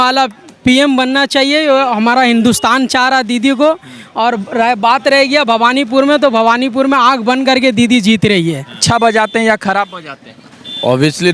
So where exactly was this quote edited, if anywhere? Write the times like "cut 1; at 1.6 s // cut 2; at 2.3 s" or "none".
cut 1; at 8.8 s